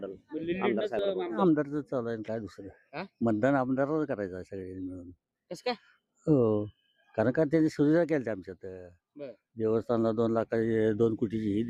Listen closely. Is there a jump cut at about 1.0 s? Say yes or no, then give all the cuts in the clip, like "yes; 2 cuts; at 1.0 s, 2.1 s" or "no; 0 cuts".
yes; 1 cut; at 1.0 s